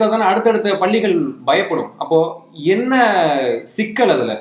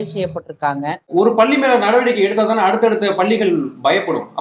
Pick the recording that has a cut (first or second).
second